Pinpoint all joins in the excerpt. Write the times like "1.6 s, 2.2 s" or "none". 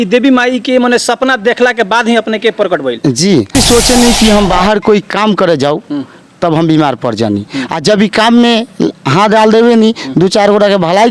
3.6 s

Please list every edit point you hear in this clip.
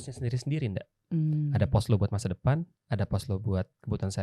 none

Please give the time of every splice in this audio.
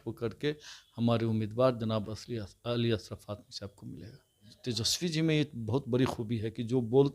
4.5 s

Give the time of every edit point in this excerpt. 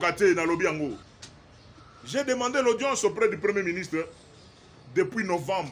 1.1 s

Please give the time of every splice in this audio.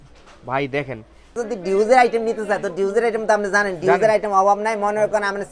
1.3 s

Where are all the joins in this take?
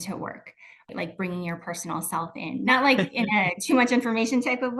0.9 s, 2.6 s

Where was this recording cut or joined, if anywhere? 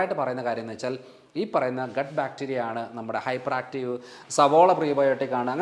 4.2 s

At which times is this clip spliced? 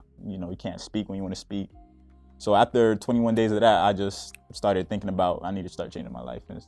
none

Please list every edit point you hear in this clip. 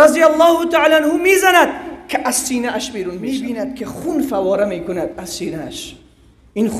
3.2 s

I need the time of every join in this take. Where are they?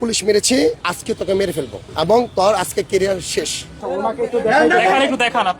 0.9 s, 1.8 s, 3.9 s

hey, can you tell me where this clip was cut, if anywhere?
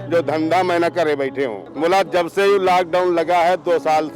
1.6 s

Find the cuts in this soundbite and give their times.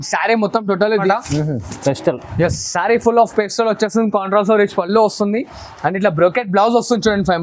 1.1 s

